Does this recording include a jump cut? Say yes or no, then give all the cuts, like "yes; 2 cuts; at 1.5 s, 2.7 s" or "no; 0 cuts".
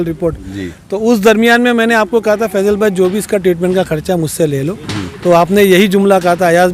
no; 0 cuts